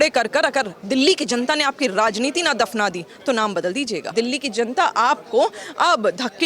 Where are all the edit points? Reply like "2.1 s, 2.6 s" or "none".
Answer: 4.1 s

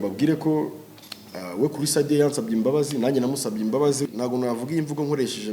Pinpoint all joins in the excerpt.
4.0 s

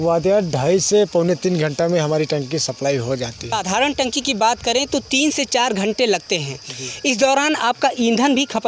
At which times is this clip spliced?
3.5 s

